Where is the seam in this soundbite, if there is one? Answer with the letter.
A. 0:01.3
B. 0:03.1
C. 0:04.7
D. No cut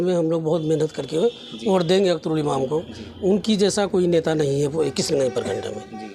D